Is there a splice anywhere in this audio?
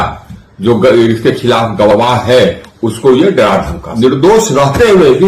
yes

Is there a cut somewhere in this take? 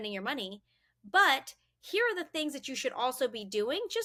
no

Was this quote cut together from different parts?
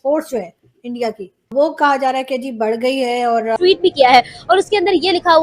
yes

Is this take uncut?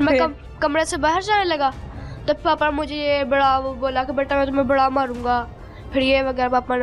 yes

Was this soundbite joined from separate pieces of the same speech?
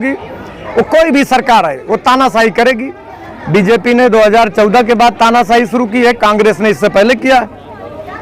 no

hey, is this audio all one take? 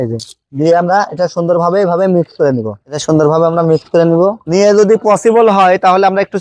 yes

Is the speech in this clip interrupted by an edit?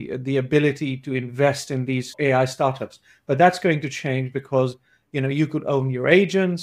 yes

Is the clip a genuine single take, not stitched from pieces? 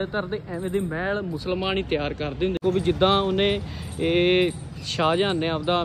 no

